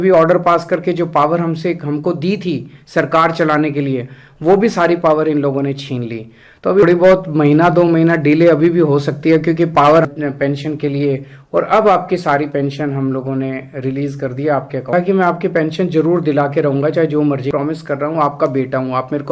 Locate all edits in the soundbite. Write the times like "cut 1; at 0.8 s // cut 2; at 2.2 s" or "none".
cut 1; at 6.8 s // cut 2; at 10.1 s // cut 3; at 14.9 s // cut 4; at 17.5 s